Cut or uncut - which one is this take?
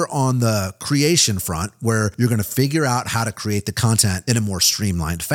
cut